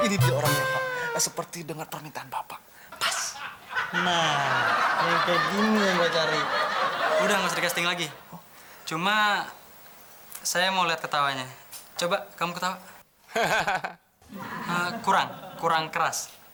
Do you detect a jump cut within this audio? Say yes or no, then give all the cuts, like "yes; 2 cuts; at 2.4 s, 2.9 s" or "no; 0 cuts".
no; 0 cuts